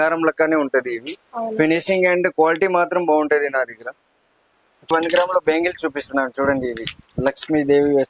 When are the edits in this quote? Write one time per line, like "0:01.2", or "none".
0:04.9

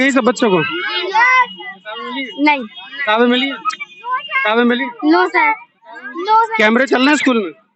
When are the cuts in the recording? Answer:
0:06.5

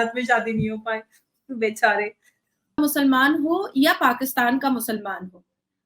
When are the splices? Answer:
0:02.8

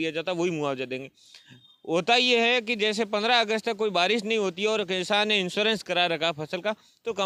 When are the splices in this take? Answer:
none

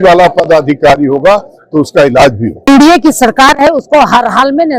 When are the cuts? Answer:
0:02.7

